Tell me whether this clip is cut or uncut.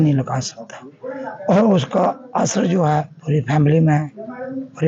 uncut